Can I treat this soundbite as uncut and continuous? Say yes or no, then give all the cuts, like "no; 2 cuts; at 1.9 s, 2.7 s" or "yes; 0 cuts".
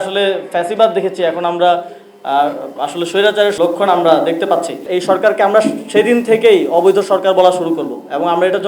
no; 2 cuts; at 3.5 s, 4.8 s